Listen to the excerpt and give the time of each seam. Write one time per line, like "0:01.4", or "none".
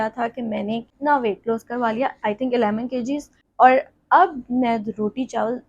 0:00.9
0:03.3